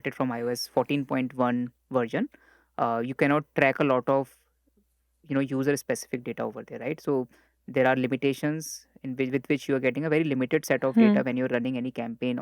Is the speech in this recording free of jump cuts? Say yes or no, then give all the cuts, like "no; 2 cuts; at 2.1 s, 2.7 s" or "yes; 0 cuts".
yes; 0 cuts